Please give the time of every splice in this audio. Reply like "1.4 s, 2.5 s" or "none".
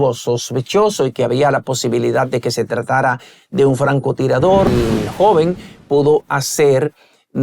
4.7 s

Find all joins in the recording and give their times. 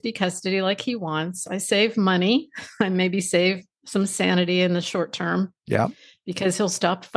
none

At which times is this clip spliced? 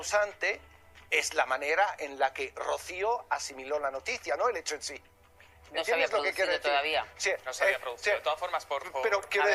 none

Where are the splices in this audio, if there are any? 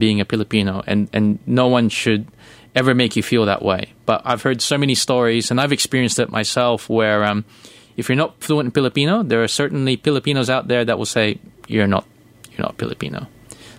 none

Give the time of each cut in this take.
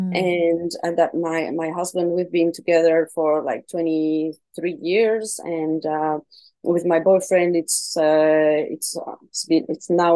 none

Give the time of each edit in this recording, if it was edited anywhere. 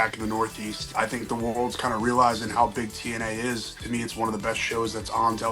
0.9 s, 3.7 s

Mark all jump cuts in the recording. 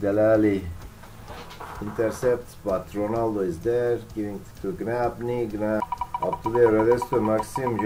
5.8 s

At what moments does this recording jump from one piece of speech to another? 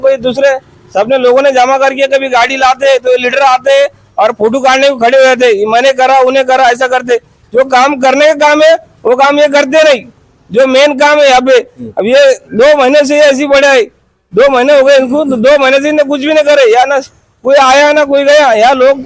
none

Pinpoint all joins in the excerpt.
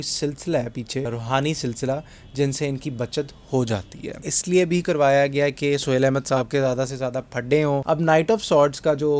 1.1 s, 4.3 s, 7.8 s

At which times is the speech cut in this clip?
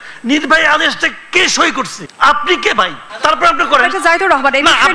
2.0 s, 3.0 s

